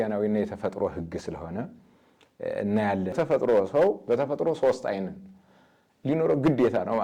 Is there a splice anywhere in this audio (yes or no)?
yes